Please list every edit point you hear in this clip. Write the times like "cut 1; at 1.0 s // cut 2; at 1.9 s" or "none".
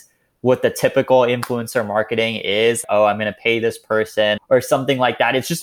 cut 1; at 2.8 s // cut 2; at 4.5 s